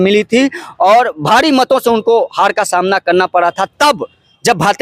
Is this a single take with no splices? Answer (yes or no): yes